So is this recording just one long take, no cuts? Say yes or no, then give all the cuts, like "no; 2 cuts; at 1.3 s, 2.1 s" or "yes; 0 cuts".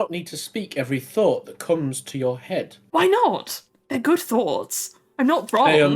yes; 0 cuts